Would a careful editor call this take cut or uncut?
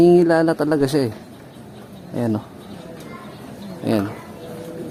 uncut